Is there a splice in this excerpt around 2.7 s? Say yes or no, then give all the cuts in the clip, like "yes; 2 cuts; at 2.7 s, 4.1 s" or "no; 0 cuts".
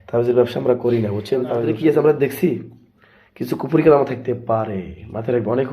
no; 1 cut; at 1.5 s